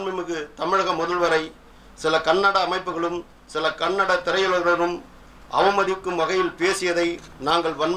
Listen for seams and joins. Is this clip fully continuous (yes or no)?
yes